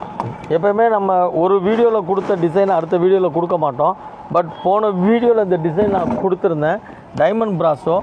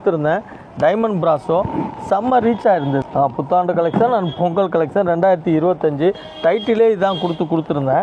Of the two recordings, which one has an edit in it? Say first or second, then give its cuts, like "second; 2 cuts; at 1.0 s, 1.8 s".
second; 1 cut; at 3.0 s